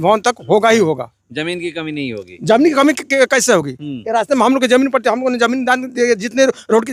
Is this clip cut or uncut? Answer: uncut